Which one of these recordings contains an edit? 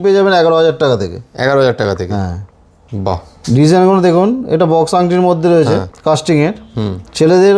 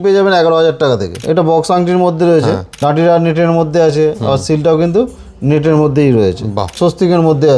second; 3 cuts; at 1.2 s, 2.7 s, 6.6 s

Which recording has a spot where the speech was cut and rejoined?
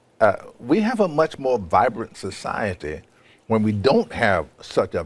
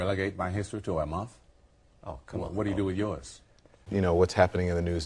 second; 1 cut; at 3.8 s

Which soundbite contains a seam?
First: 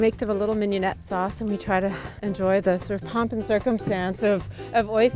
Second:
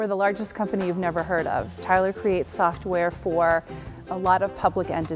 second; 1 cut; at 1.7 s

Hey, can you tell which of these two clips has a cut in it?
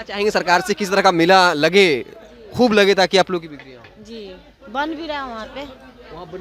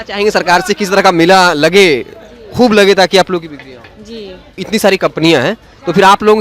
second; 1 cut; at 4.6 s

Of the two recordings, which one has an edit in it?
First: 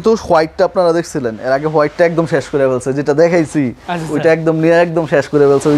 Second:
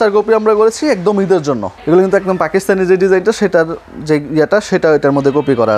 second; 1 cut; at 1.7 s

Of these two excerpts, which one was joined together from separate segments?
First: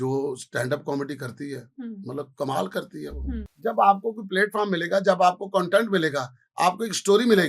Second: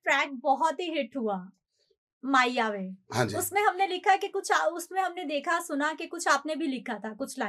first; 1 cut; at 3.4 s

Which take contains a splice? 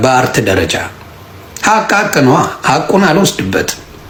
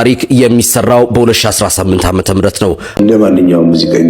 second; 1 cut; at 2.9 s

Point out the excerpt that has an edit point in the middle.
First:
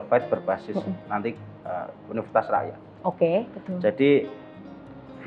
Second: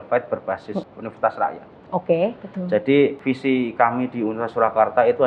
second; 2 cuts; at 0.9 s, 3.2 s

